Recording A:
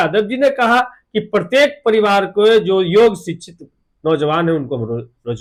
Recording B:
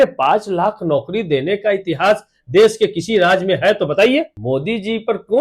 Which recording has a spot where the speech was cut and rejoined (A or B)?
B